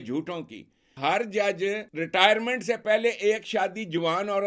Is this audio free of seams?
no; 2 cuts; at 0.9 s, 1.9 s

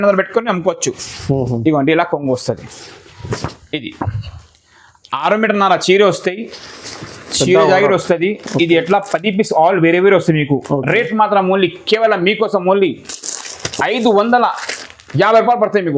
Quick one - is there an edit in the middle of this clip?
no; 0 cuts

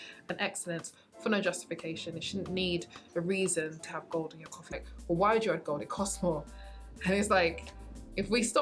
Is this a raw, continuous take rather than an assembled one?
no; 1 cut; at 4.7 s

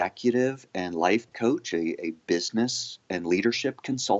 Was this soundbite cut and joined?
no; 0 cuts

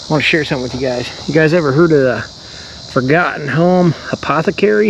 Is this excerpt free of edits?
yes; 0 cuts

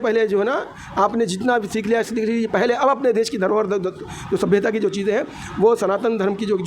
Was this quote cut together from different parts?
no; 0 cuts

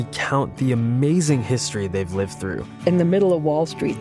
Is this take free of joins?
yes; 0 cuts

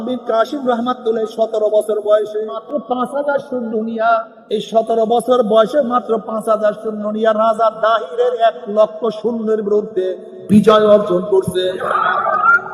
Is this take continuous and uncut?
no; 2 cuts; at 2.5 s, 4.4 s

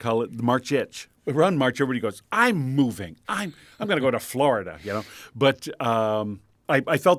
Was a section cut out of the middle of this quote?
no; 0 cuts

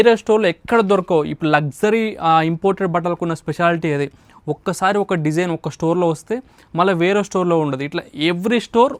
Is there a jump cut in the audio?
no; 0 cuts

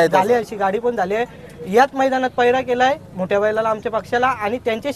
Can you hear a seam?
no; 0 cuts

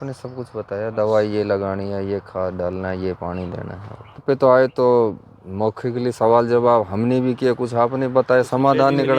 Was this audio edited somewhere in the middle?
yes; 1 cut; at 4.2 s

